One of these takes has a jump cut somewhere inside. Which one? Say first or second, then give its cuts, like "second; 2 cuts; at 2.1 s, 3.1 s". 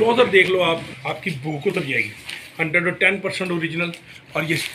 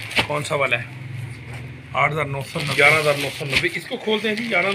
second; 1 cut; at 2.7 s